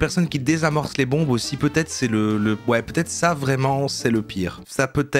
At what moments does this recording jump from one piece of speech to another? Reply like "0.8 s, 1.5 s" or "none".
none